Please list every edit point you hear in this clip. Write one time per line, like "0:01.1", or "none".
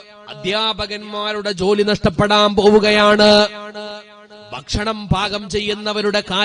none